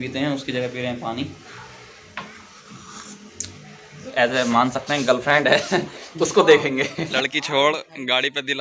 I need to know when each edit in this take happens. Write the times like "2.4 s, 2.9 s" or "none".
4.1 s, 7.0 s